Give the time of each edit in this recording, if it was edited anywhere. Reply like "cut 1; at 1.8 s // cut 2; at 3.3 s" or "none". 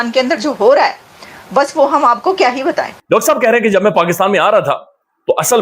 cut 1; at 2.9 s